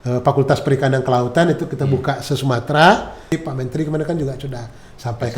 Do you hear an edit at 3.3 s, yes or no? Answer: yes